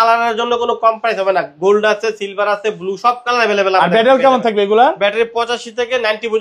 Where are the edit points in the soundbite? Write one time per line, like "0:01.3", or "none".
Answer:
none